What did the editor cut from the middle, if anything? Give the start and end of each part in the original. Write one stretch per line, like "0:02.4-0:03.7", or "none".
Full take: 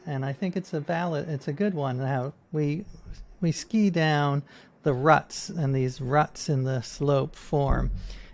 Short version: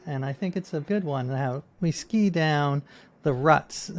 0:00.8-0:01.5
0:02.4-0:03.3